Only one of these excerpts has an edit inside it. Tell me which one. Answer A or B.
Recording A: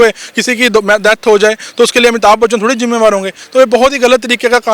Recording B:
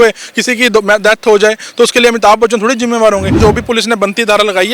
B